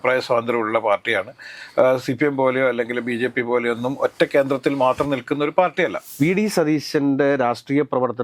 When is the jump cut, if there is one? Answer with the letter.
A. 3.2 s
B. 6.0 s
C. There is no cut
B